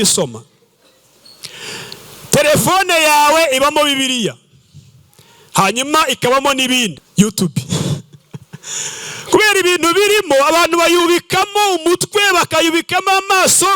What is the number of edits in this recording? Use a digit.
1